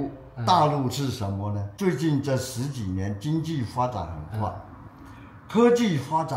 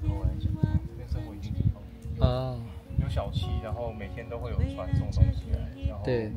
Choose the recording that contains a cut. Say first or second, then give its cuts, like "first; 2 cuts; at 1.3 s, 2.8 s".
first; 1 cut; at 1.7 s